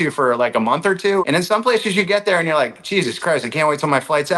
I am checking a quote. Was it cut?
yes; 1 cut; at 1.2 s

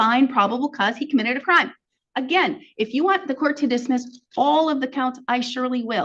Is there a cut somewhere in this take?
no; 0 cuts

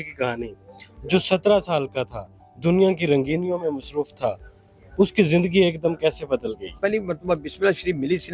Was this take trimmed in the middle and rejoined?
yes; 1 cut; at 6.8 s

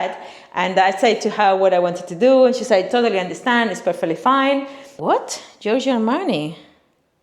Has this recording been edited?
yes; 1 cut; at 4.8 s

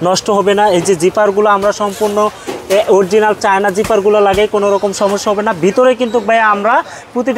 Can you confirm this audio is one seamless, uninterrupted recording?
yes; 0 cuts

